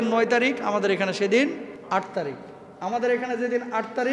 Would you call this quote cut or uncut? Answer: cut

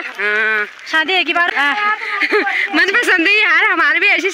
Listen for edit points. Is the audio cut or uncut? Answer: cut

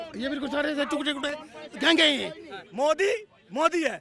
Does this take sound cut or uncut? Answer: cut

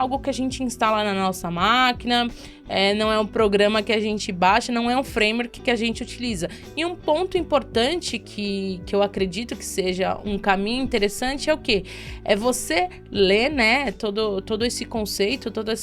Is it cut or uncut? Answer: cut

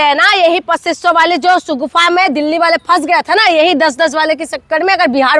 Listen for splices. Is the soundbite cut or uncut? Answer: uncut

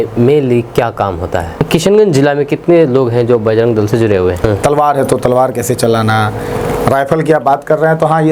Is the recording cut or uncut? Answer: cut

